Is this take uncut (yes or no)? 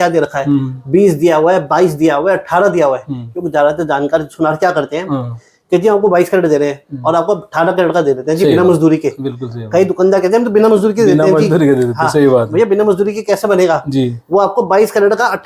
yes